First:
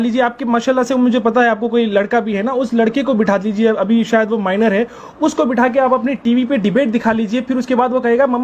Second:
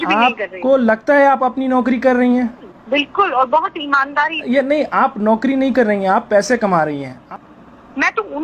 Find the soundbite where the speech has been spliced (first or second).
second